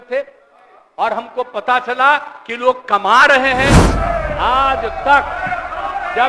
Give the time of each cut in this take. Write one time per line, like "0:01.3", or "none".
0:03.9